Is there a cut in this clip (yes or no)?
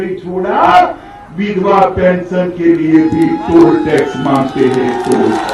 no